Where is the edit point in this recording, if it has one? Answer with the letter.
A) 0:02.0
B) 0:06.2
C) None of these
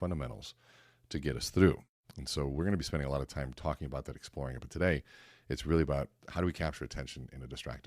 B